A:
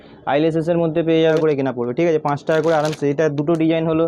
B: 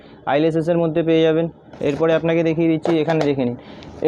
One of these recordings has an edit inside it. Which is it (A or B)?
A